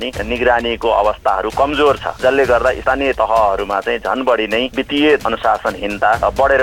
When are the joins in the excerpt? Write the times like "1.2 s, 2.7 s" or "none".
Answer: 3.0 s, 4.8 s